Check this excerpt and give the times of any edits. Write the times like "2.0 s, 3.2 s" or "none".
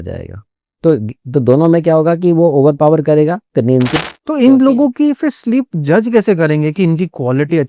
4.0 s